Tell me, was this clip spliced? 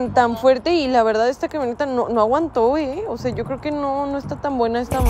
no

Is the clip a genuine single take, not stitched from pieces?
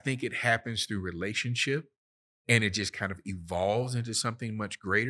yes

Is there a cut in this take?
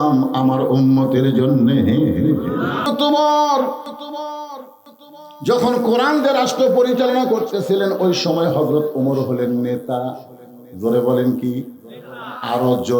yes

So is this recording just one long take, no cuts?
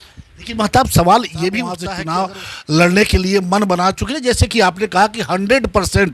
no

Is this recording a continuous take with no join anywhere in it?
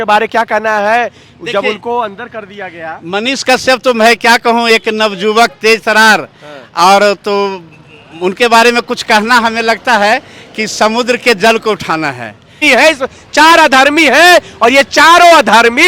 no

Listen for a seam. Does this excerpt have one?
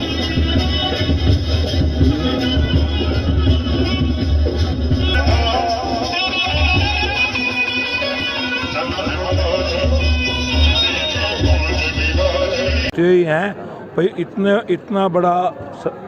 yes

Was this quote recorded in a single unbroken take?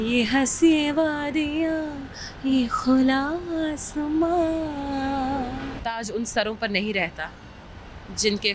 no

